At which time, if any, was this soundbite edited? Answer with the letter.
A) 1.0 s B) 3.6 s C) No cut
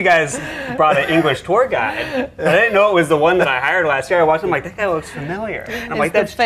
C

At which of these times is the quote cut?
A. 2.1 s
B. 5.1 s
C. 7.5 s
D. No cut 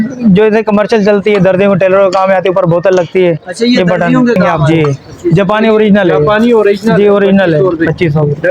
B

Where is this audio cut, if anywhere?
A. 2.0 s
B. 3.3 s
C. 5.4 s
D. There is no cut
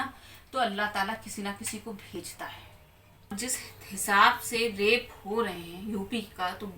B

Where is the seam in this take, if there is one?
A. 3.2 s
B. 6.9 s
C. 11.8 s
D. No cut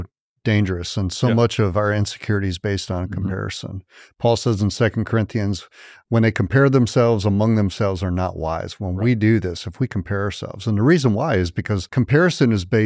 C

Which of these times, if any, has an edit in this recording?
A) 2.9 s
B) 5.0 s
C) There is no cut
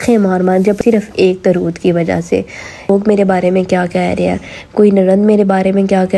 A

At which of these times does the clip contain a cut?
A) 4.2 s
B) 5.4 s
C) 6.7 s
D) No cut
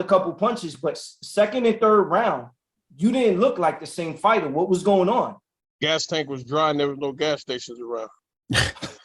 D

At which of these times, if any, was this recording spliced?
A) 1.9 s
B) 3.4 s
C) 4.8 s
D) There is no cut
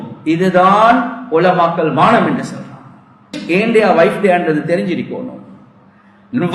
B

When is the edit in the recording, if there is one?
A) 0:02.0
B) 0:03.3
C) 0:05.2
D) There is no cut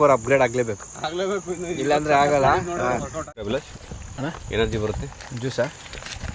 B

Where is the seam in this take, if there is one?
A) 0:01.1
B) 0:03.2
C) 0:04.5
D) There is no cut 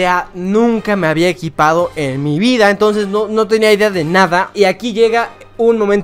C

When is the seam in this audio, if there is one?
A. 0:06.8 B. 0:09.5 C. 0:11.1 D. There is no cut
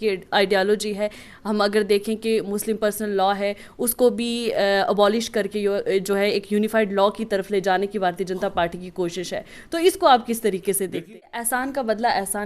C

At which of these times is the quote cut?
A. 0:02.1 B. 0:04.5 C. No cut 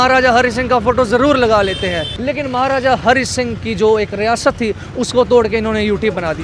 A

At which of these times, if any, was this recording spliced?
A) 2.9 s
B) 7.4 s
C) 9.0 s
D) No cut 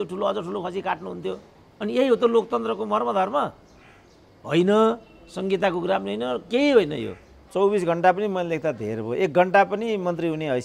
B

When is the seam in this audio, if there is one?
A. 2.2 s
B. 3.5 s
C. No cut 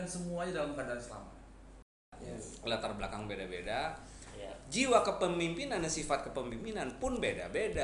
A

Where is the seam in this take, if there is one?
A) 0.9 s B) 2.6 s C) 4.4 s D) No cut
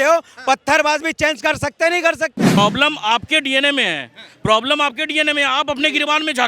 B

